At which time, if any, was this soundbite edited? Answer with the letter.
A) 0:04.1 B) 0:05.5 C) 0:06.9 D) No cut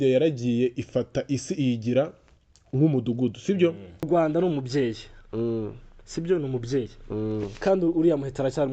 A